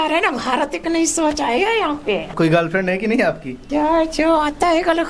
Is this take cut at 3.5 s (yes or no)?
yes